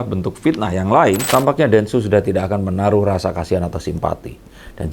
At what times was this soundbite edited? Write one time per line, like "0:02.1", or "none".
0:01.2